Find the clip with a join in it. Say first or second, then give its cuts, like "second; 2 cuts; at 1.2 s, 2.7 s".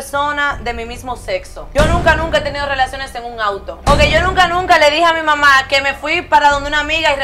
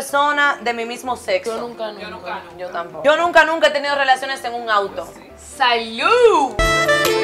first; 2 cuts; at 1.6 s, 3.8 s